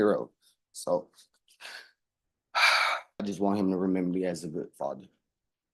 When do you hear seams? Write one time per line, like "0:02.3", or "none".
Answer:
0:03.2